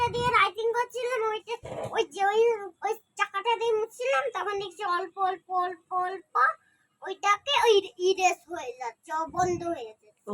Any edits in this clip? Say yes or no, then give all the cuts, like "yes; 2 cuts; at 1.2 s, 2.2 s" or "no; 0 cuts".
no; 0 cuts